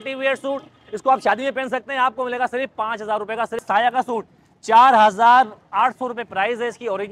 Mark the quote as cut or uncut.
cut